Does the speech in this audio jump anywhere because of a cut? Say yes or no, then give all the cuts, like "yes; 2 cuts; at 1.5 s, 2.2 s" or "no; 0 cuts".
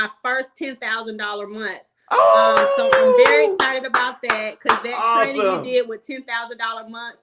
no; 0 cuts